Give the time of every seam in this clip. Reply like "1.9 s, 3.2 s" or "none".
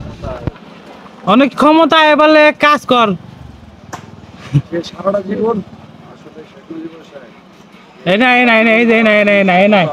none